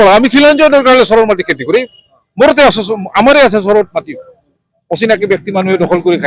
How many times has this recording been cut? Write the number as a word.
zero